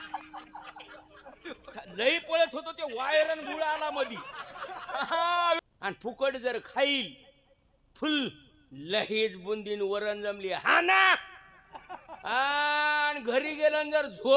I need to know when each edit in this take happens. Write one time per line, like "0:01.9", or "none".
0:05.6